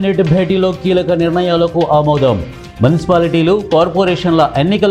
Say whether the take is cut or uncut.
uncut